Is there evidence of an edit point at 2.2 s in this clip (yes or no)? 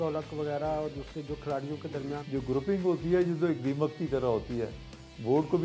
yes